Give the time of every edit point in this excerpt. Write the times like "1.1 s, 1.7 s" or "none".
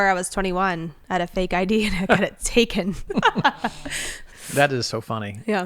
3.1 s, 4.3 s